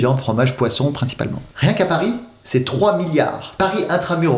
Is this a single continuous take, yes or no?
no